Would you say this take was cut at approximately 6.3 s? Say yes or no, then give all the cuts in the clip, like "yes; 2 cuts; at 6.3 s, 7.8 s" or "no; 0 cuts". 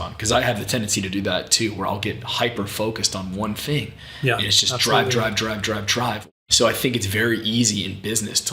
yes; 1 cut; at 6.3 s